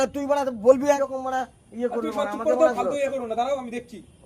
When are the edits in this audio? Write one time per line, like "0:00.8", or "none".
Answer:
0:01.0